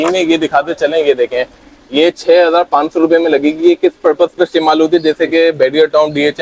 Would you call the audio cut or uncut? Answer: uncut